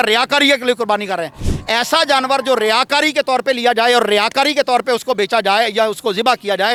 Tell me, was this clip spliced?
no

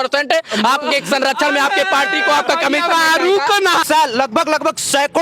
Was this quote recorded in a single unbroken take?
no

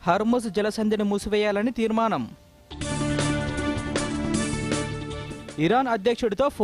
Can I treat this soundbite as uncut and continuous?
yes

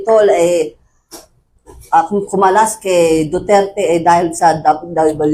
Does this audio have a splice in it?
no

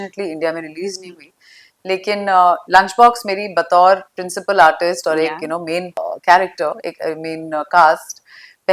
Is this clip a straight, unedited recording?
no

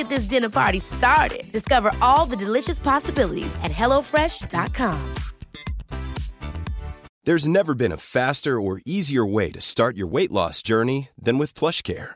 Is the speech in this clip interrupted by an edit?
yes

